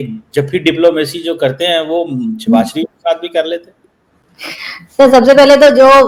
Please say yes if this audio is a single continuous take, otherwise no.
yes